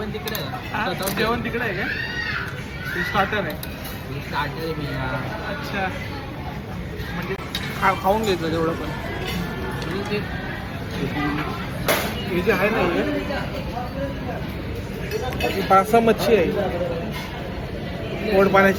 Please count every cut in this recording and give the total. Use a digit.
0